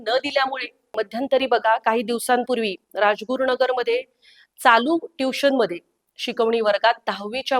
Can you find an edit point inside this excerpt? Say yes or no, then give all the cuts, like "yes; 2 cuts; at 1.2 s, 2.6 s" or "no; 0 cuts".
yes; 1 cut; at 1.0 s